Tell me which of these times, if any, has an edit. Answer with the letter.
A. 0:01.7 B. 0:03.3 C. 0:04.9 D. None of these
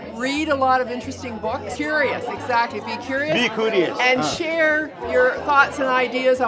A